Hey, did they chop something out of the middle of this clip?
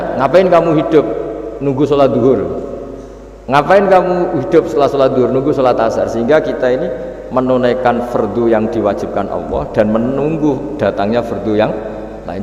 no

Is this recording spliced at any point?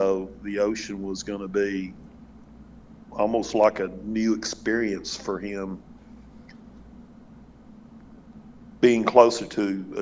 no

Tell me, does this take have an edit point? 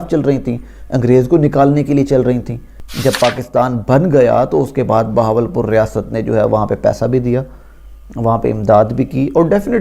yes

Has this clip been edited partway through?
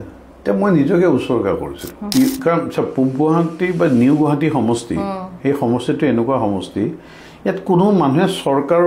yes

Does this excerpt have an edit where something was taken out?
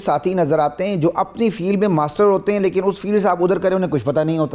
no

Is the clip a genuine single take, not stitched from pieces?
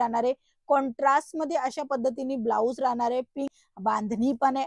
no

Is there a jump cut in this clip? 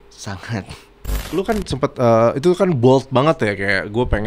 yes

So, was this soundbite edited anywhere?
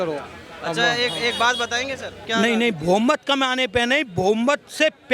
yes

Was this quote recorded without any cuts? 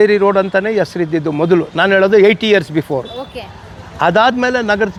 yes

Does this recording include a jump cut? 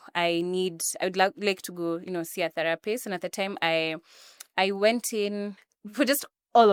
no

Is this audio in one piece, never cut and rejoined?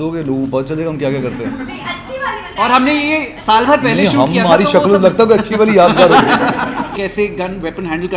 no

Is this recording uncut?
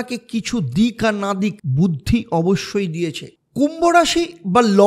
yes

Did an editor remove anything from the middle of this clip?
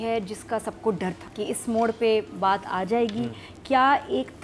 yes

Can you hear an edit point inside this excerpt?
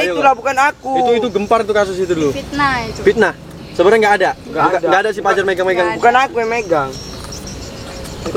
no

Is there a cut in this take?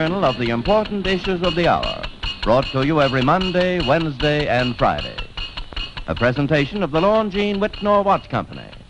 yes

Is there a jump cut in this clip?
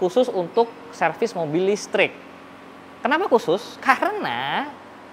no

